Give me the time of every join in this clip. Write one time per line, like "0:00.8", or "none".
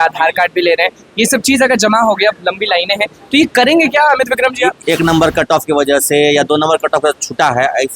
0:04.8